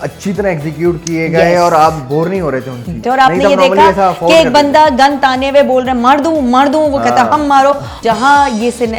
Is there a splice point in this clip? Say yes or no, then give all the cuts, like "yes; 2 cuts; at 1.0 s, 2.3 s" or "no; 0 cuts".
yes; 2 cuts; at 3.0 s, 8.0 s